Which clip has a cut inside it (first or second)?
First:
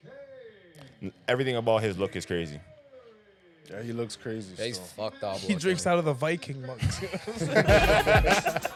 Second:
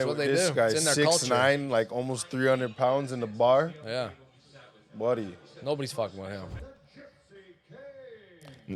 second